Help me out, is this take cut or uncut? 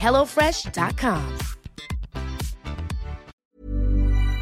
cut